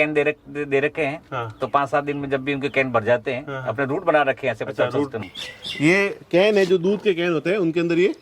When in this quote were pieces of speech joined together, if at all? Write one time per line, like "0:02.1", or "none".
0:05.2

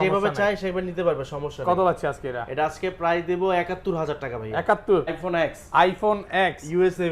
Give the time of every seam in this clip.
0:05.1

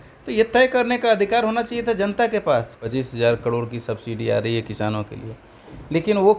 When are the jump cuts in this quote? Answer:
0:02.8

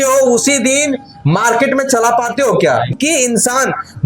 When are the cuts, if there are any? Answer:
0:02.9

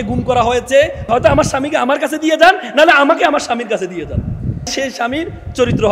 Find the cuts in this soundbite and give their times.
0:01.0
0:04.7

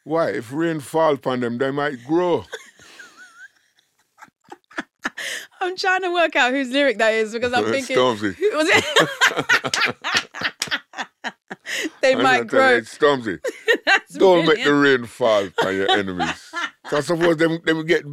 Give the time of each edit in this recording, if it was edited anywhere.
none

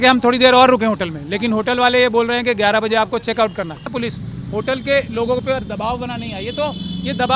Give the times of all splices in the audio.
0:03.9

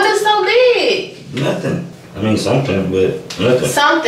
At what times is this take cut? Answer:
0:02.0

